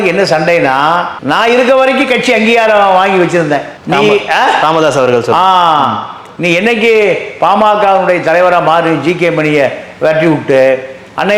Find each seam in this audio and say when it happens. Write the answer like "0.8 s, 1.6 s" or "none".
none